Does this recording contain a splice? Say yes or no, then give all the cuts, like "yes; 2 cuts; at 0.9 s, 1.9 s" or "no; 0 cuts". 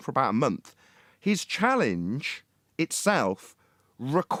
no; 0 cuts